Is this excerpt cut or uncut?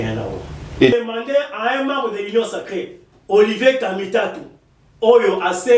cut